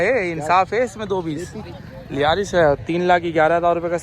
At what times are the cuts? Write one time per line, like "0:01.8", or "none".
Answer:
0:01.5